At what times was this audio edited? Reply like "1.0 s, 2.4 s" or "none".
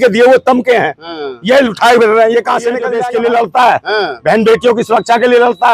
2.9 s